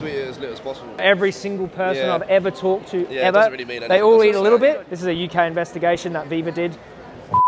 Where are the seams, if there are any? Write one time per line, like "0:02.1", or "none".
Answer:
0:01.0
0:04.9